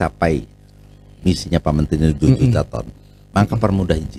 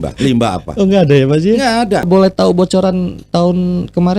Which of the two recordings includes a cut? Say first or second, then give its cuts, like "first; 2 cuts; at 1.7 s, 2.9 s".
second; 1 cut; at 2.1 s